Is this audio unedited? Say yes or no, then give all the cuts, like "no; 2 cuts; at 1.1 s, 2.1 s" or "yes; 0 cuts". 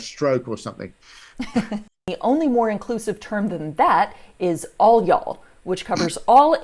no; 1 cut; at 2.1 s